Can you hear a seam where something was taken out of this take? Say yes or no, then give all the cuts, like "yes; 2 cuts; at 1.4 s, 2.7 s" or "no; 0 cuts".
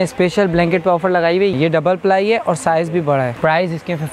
yes; 2 cuts; at 1.5 s, 3.4 s